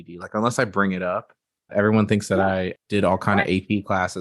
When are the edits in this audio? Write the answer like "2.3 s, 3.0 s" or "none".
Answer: 1.7 s, 2.8 s

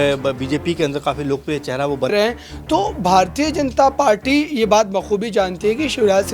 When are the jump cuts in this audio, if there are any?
2.1 s

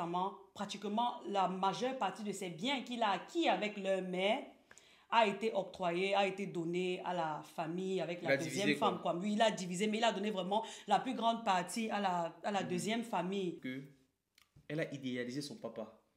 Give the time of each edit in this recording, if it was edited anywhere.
13.6 s

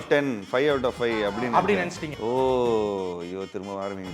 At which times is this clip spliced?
2.0 s

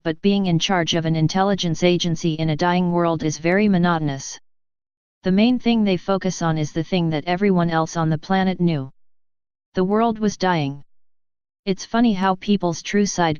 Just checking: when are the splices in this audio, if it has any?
2.4 s

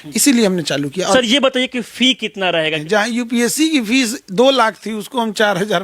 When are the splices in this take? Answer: 1.1 s, 2.8 s

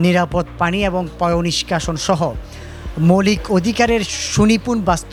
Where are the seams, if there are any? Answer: none

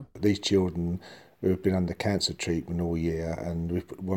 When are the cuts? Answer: none

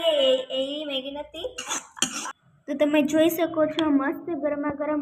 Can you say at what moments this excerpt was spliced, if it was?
2.2 s

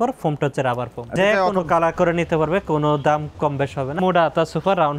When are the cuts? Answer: 1.1 s, 4.0 s

